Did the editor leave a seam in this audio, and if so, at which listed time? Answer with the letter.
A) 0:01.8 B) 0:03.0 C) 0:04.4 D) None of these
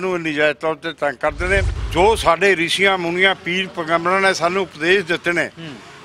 A